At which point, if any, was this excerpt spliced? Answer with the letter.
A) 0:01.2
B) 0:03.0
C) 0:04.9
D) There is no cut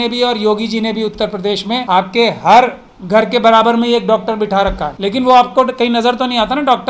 C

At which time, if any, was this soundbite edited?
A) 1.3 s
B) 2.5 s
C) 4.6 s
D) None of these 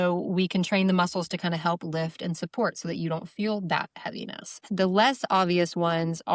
C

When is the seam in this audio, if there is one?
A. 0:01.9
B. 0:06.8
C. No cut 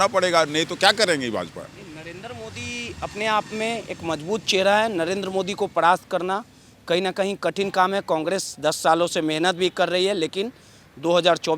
C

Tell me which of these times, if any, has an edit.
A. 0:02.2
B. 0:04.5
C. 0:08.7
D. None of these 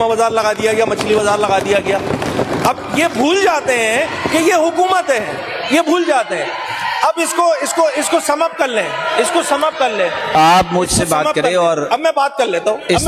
D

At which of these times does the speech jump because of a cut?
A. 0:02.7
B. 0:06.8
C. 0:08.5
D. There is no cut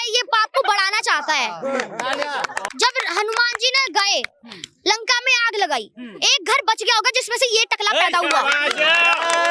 A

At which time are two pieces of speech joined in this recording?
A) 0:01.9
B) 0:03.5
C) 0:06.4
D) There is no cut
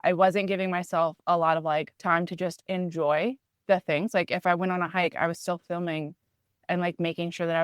A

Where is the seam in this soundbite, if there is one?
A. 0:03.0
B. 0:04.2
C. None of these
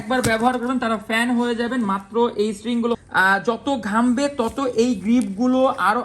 A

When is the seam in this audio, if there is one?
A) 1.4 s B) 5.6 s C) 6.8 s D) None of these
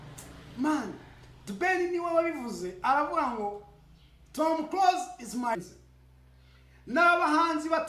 B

